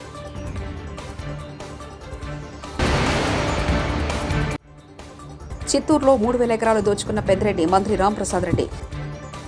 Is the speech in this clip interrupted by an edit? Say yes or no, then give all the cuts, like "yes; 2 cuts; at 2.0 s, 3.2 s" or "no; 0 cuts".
yes; 1 cut; at 0.9 s